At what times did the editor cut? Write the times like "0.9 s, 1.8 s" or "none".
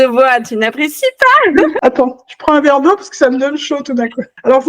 1.8 s